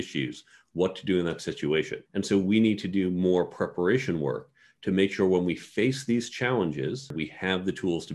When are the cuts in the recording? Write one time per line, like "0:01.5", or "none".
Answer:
0:07.1